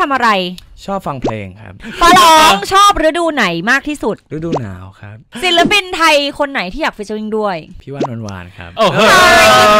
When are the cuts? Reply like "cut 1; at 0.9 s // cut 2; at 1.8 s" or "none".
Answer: cut 1; at 1.8 s // cut 2; at 5.3 s